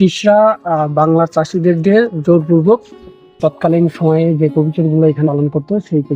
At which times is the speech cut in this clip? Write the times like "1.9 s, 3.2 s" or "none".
3.1 s

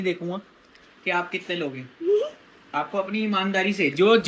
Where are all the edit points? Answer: none

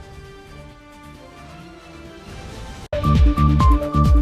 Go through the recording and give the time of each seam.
2.9 s

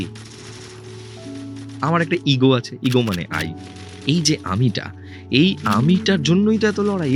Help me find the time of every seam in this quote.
none

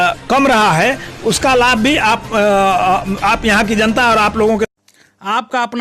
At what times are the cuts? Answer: 4.7 s

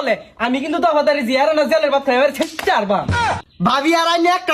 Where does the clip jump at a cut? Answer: 3.3 s

